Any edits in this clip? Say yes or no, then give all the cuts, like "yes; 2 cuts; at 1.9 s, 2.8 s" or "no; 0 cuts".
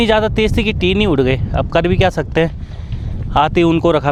no; 0 cuts